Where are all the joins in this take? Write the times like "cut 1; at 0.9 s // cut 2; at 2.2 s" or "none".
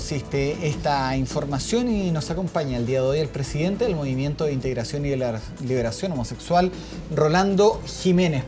cut 1; at 2.0 s